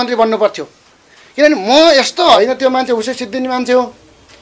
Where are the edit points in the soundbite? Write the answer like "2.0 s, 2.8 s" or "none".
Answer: 2.4 s